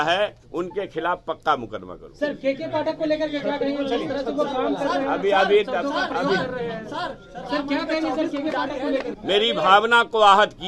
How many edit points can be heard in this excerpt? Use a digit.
1